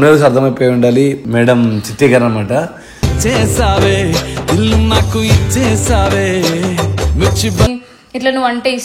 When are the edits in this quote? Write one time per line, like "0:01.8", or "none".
0:07.8

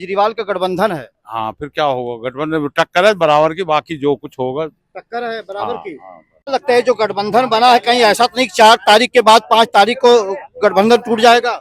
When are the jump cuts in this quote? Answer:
0:06.5

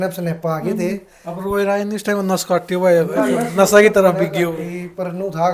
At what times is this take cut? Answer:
none

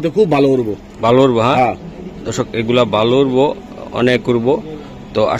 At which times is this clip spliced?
none

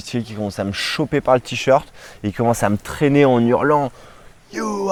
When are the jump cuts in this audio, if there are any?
none

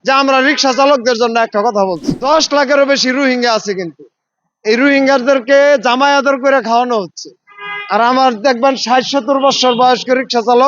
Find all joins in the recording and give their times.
0:02.1

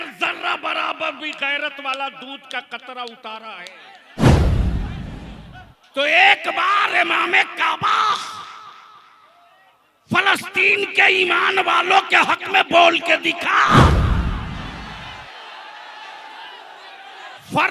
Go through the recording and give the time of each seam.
none

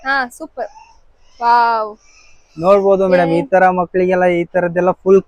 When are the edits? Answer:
none

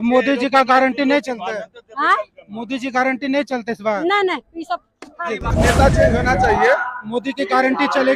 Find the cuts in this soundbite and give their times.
0:05.5

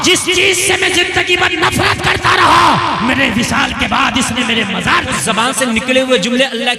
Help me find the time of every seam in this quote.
0:05.1

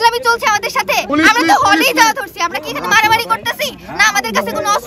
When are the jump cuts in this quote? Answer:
0:01.1

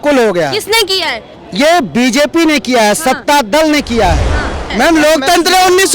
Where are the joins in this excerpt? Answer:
0:04.7

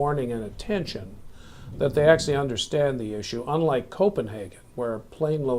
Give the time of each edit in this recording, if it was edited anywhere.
none

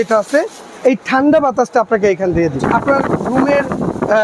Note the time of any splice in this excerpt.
0:02.6

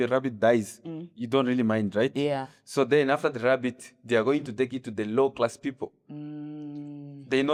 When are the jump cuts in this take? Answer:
none

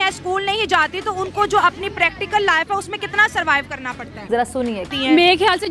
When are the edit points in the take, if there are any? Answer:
0:04.4

